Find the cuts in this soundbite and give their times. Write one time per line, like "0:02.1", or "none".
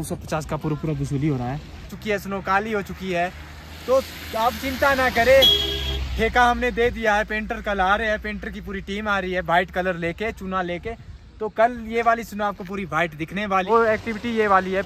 0:02.0
0:13.7